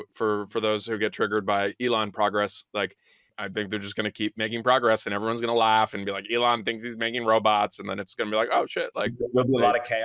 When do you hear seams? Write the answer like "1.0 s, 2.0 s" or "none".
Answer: 3.3 s